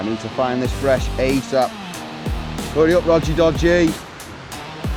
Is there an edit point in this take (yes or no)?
no